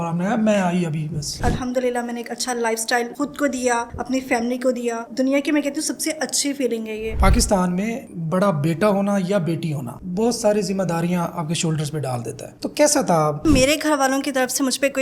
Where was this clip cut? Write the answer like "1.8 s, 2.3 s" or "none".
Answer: 1.4 s, 5.1 s, 7.2 s, 12.5 s, 13.4 s